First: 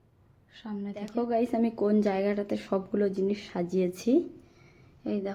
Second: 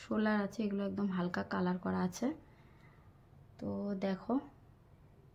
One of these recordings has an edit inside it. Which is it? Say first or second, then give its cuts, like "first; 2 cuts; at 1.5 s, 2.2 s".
first; 1 cut; at 1.1 s